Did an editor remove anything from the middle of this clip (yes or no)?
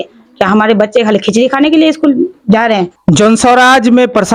no